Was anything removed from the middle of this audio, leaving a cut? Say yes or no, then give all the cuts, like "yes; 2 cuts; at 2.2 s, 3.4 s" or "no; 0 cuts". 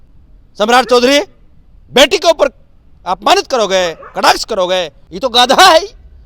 yes; 1 cut; at 5.0 s